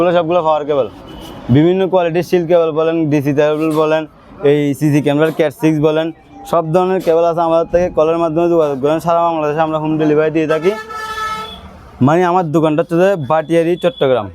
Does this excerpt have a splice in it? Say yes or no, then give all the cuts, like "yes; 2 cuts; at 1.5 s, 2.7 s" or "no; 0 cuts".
no; 0 cuts